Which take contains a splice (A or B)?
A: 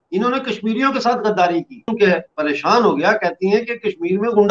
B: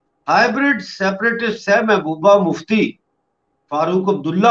A